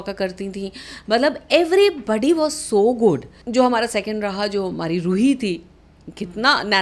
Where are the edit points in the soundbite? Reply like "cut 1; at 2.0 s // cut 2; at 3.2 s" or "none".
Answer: cut 1; at 3.3 s

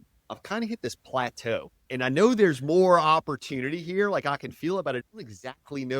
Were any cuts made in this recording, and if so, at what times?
cut 1; at 5.0 s

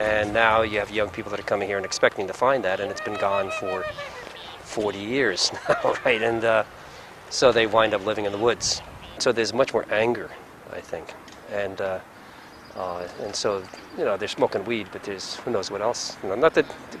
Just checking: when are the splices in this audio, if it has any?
cut 1; at 8.7 s

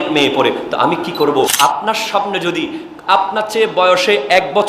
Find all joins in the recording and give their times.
cut 1; at 1.5 s

